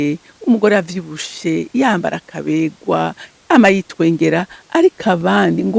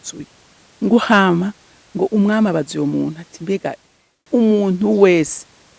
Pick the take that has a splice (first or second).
second